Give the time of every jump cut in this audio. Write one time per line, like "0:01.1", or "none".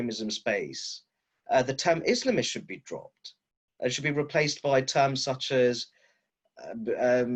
none